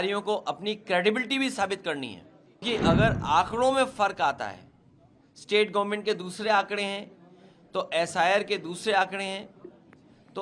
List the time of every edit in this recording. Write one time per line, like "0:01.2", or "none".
0:02.6